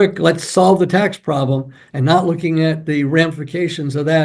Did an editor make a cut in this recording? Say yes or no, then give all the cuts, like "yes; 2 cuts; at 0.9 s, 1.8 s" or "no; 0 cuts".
no; 0 cuts